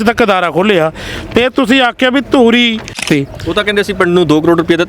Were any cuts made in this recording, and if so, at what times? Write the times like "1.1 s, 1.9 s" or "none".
3.0 s